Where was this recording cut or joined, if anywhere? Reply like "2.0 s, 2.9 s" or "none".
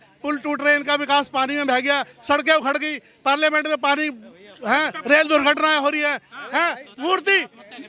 none

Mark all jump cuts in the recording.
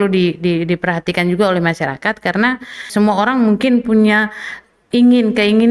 2.9 s

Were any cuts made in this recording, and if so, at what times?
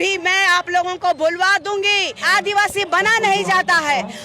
2.2 s

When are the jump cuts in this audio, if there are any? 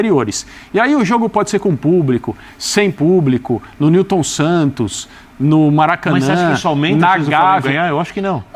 none

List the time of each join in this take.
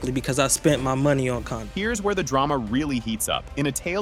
none

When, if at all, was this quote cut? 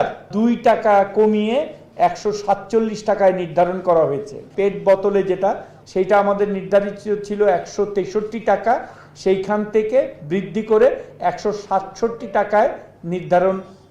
4.4 s, 5.8 s

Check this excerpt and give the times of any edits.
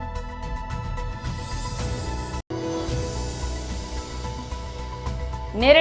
1.3 s, 5.0 s

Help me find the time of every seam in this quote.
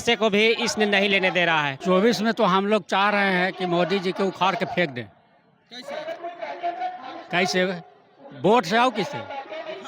1.7 s

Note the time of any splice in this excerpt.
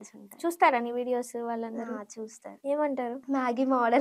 2.5 s, 3.2 s

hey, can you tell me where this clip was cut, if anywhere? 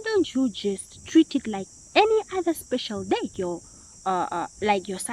3.3 s

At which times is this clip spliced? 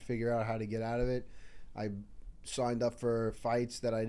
none

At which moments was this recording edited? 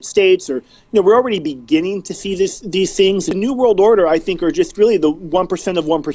3.3 s

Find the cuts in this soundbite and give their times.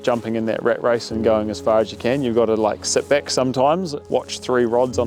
4.0 s

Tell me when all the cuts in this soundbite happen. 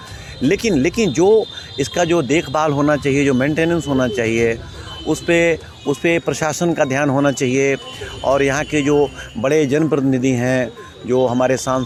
none

